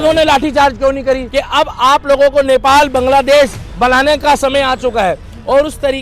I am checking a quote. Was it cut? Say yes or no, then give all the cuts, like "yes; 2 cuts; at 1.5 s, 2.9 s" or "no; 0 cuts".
yes; 2 cuts; at 1.2 s, 3.6 s